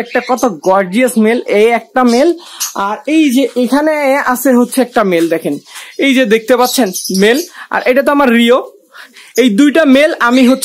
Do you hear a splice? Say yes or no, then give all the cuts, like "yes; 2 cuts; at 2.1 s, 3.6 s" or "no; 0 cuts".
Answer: no; 0 cuts